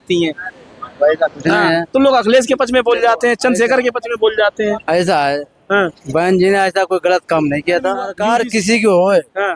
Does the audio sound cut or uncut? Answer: cut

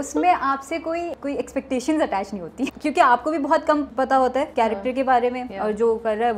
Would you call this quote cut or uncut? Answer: cut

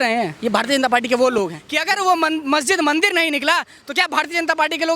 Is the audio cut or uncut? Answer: cut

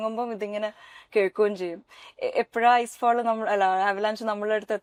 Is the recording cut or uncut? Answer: uncut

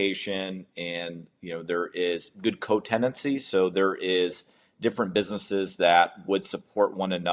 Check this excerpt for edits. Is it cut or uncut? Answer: uncut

